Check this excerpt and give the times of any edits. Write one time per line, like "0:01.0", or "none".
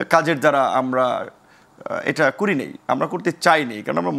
none